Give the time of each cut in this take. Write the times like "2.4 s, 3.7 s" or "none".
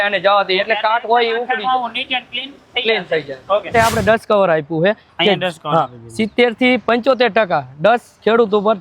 3.7 s

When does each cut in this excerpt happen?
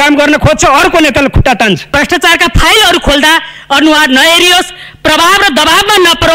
1.9 s

